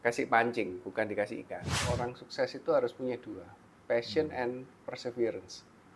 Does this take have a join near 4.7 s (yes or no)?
no